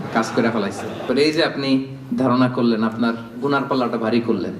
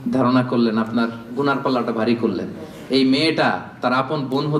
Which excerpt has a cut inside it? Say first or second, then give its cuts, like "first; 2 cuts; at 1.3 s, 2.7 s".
first; 1 cut; at 1.0 s